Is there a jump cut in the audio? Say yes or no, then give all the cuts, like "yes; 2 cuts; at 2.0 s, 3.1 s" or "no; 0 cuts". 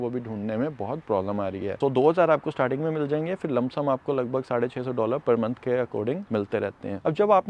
no; 0 cuts